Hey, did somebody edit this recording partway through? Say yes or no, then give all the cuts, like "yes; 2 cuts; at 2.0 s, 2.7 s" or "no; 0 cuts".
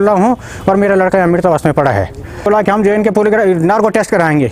yes; 1 cut; at 2.5 s